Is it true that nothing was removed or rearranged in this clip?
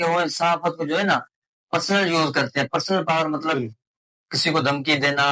yes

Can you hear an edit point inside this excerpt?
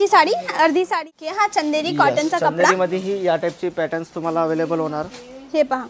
yes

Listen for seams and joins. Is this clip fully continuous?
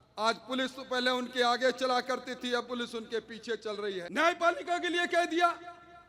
no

